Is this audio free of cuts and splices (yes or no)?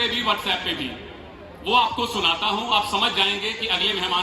yes